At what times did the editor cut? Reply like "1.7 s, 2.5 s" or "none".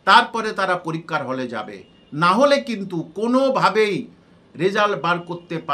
none